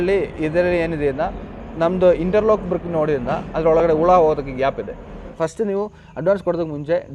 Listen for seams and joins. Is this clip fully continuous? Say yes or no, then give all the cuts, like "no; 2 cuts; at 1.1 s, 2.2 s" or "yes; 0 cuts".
no; 1 cut; at 5.3 s